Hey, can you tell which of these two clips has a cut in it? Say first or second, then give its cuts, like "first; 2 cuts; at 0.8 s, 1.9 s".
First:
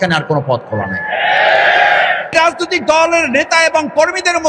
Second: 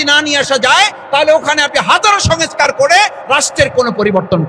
first; 1 cut; at 2.2 s